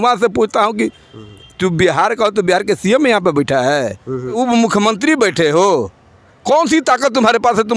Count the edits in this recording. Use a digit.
1